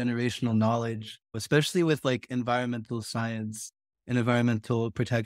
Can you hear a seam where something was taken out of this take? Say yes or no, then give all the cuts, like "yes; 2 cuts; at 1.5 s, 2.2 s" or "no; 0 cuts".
yes; 1 cut; at 1.3 s